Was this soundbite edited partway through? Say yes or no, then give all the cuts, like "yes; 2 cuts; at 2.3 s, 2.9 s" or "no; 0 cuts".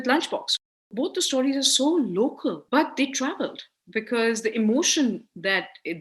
yes; 2 cuts; at 0.8 s, 2.6 s